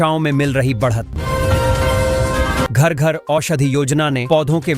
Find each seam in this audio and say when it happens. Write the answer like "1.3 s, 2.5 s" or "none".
1.1 s, 2.7 s